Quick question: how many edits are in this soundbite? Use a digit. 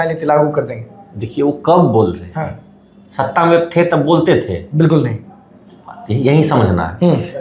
0